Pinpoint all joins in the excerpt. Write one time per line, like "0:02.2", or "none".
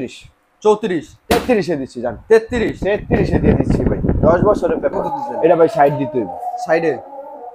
0:05.0